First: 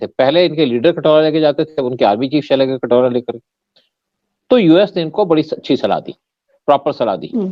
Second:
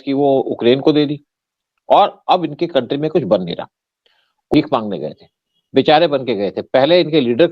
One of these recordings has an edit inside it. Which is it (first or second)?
second